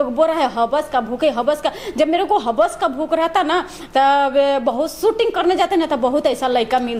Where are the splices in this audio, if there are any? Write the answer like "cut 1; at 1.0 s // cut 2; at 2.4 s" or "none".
none